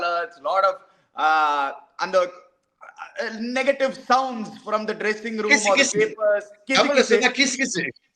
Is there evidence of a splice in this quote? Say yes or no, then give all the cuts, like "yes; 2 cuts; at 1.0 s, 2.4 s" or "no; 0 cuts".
no; 0 cuts